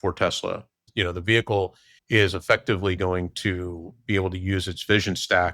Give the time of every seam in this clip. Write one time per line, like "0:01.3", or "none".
0:00.9
0:01.9
0:03.9